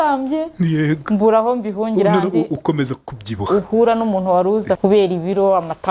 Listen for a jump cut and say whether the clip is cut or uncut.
cut